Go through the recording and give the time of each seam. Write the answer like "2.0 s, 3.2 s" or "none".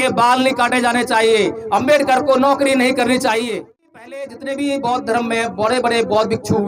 3.9 s